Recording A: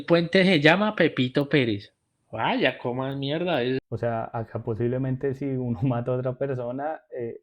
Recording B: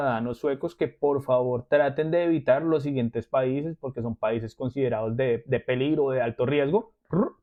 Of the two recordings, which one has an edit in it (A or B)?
A